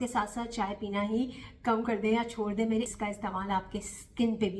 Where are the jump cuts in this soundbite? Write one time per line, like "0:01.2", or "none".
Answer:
0:02.9